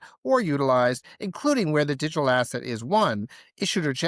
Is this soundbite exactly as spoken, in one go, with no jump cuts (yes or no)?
yes